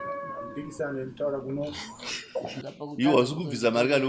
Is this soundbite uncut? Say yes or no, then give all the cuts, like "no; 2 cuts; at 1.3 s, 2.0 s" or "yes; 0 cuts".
no; 1 cut; at 2.7 s